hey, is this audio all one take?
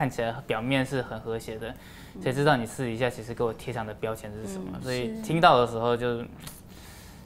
yes; 0 cuts

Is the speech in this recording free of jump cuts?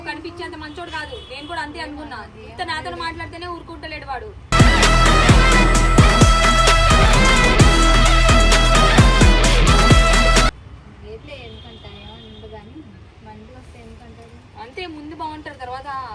yes; 0 cuts

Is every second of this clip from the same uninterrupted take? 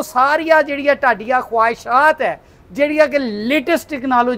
yes; 0 cuts

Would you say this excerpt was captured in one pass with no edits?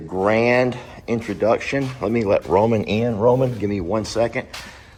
yes; 0 cuts

